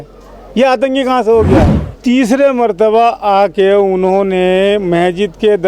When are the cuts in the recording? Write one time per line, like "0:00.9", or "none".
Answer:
0:01.8